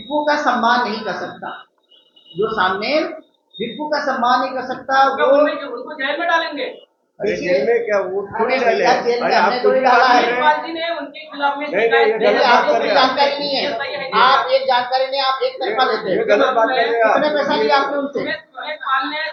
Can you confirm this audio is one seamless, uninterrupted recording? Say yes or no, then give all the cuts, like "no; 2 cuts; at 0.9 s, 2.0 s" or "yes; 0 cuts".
yes; 0 cuts